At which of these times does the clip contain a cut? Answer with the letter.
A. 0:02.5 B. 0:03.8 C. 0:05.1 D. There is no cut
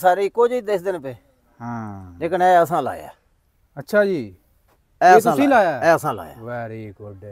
D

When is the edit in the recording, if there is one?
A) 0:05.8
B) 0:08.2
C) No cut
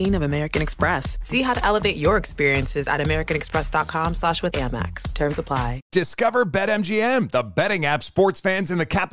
A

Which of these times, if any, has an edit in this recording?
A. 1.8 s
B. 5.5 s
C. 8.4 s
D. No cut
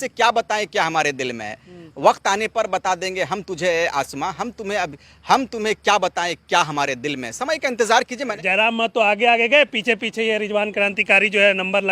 C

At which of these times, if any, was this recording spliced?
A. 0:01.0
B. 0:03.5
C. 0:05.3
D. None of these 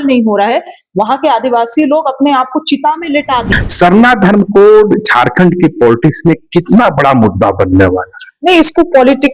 B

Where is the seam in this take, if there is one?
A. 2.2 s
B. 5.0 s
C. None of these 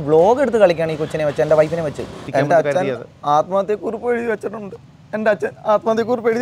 A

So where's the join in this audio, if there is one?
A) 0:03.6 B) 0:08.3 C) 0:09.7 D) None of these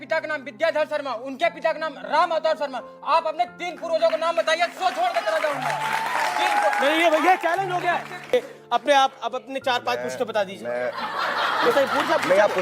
B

